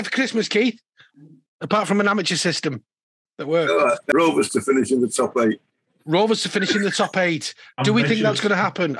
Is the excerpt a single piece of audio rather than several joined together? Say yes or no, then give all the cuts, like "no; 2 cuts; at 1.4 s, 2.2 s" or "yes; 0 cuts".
no; 1 cut; at 4.0 s